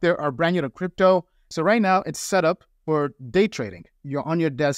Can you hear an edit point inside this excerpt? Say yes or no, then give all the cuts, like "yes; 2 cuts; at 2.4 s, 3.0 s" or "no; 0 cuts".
yes; 2 cuts; at 1.4 s, 3.8 s